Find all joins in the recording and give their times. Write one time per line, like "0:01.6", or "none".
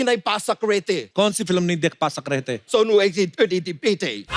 0:01.1
0:02.6